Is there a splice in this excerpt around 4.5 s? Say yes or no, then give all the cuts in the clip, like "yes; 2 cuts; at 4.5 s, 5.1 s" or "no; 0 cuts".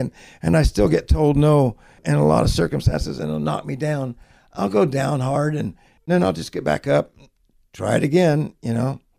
no; 2 cuts; at 2.0 s, 6.1 s